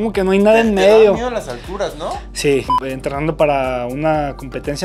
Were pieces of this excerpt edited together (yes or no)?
yes